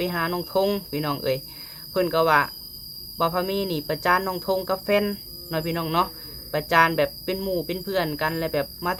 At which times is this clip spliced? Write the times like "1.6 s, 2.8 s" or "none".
none